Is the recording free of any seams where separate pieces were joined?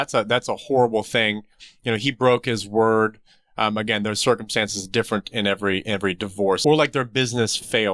no; 1 cut; at 6.6 s

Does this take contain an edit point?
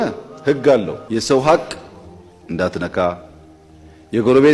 yes; 1 cut; at 1.0 s

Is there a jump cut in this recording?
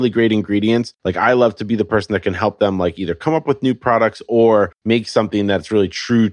yes; 2 cuts; at 1.0 s, 4.8 s

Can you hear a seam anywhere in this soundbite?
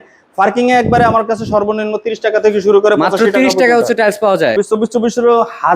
yes; 1 cut; at 4.5 s

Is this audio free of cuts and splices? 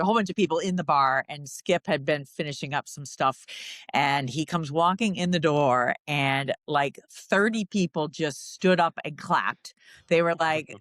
no; 1 cut; at 3.6 s

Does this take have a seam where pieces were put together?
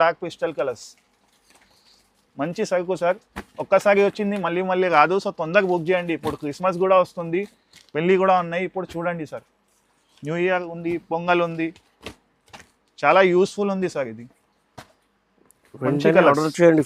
no; 0 cuts

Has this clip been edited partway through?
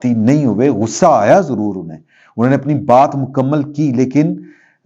no; 0 cuts

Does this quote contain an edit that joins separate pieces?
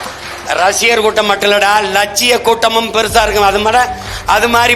no; 0 cuts

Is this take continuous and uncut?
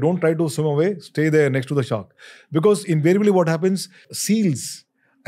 no; 1 cut; at 4.1 s

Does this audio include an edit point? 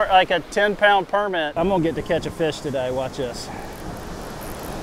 yes; 1 cut; at 1.5 s

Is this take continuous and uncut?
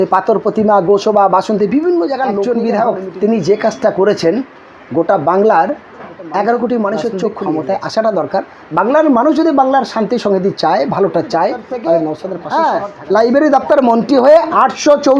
no; 3 cuts; at 2.4 s, 7.3 s, 12.3 s

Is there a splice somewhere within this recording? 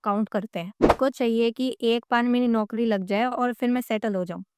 yes; 1 cut; at 1.0 s

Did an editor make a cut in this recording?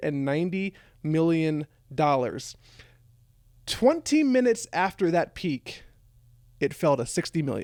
no; 0 cuts

